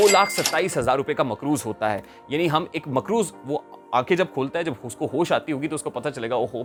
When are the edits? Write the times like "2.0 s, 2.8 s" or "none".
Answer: none